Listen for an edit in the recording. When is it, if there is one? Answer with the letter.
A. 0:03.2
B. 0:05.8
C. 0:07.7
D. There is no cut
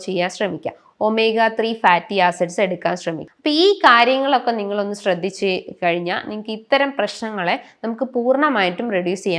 A